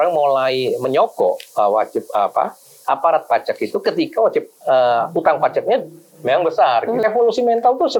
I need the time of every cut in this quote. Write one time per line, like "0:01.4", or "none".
0:07.0